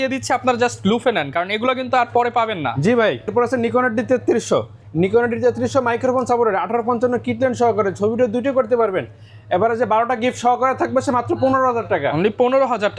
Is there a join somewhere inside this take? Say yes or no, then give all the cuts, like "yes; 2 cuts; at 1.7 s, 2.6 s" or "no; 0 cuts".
no; 0 cuts